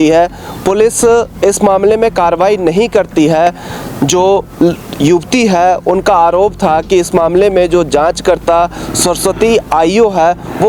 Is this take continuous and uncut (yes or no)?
yes